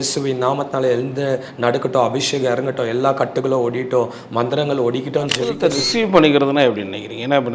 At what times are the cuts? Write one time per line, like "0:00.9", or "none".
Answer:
0:05.6